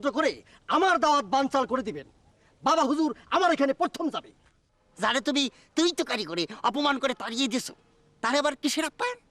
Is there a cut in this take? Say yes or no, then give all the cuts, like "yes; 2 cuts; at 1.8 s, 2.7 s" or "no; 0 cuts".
yes; 1 cut; at 2.4 s